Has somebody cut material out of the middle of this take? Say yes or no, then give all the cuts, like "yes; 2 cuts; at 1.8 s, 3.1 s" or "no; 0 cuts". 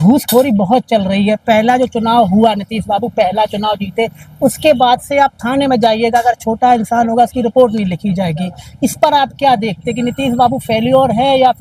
no; 0 cuts